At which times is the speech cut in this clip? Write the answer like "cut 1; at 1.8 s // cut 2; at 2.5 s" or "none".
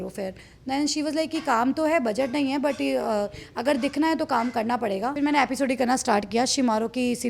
cut 1; at 5.1 s

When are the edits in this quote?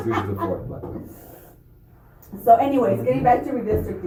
none

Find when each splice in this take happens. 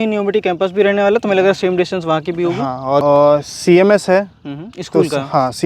cut 1; at 3.0 s

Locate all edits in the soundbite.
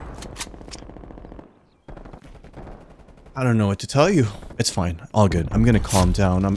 cut 1; at 4.4 s

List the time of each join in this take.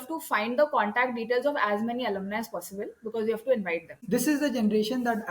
cut 1; at 4.0 s

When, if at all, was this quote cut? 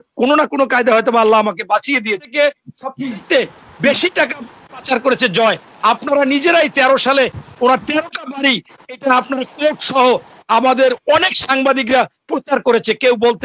cut 1; at 2.2 s

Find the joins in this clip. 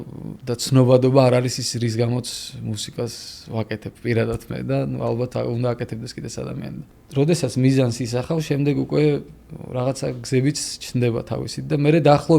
cut 1; at 6.9 s

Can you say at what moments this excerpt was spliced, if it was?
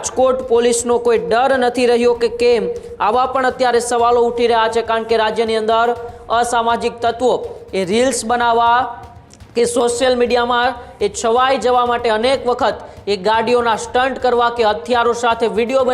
none

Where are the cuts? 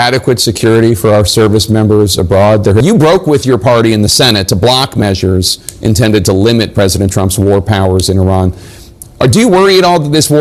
cut 1; at 2.8 s

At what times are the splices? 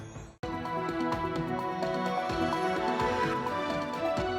none

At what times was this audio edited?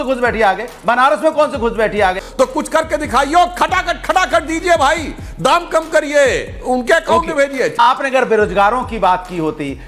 cut 1; at 2.2 s // cut 2; at 7.7 s

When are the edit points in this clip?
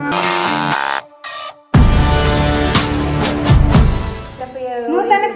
cut 1; at 4.2 s

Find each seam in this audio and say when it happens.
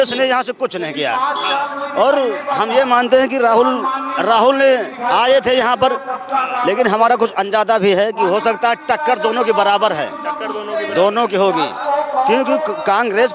none

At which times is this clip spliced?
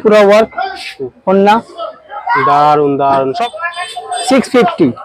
cut 1; at 3.3 s

